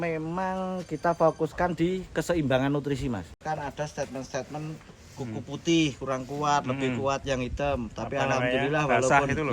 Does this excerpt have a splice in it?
yes; 1 cut; at 3.4 s

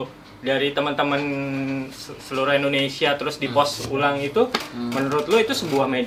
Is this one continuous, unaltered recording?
yes; 0 cuts

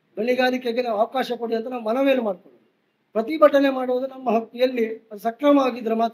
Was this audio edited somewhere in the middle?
no; 0 cuts

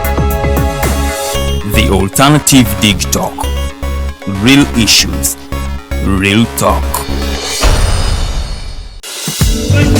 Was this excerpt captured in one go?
yes; 0 cuts

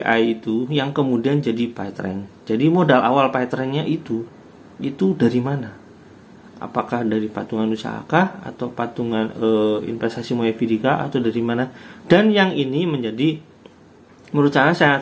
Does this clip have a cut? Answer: no; 0 cuts

